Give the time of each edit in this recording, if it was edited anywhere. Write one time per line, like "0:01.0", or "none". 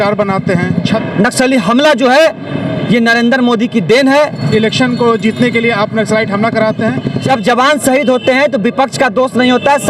0:01.0
0:04.4
0:07.2